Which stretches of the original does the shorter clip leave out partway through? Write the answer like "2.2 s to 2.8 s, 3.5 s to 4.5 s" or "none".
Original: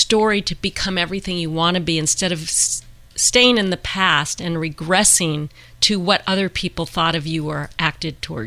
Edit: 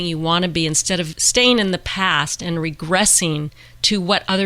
2.5 s to 3.2 s